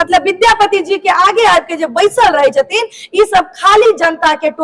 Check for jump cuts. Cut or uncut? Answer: uncut